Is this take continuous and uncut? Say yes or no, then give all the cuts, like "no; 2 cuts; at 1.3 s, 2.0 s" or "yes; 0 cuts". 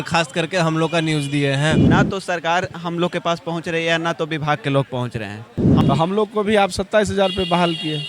no; 2 cuts; at 1.8 s, 5.6 s